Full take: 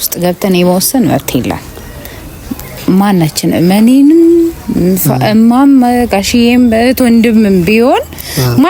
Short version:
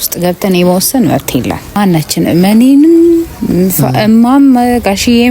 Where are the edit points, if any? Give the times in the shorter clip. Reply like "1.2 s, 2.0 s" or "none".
1.8 s